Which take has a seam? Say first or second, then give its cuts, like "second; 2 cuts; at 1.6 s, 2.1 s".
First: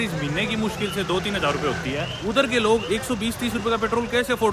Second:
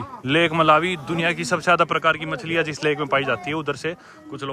first; 2 cuts; at 2.1 s, 2.8 s